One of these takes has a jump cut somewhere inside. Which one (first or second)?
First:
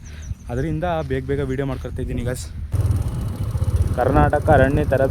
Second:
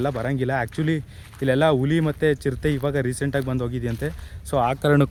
first